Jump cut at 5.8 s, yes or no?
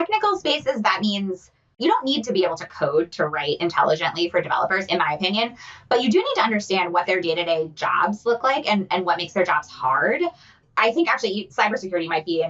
no